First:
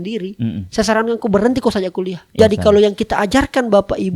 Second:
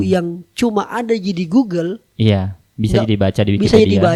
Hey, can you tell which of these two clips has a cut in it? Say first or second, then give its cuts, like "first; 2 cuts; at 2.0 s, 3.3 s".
first; 1 cut; at 2.2 s